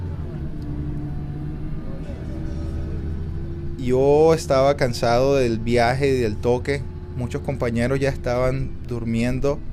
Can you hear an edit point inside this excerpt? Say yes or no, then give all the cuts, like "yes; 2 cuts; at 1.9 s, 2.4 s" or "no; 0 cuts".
no; 0 cuts